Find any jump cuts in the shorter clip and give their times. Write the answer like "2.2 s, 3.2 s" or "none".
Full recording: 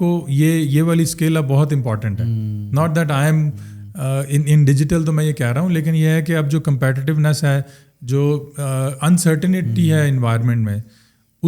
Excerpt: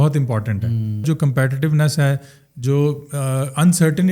1.0 s